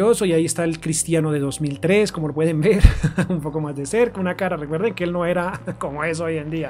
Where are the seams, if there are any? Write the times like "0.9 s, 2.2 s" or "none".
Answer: none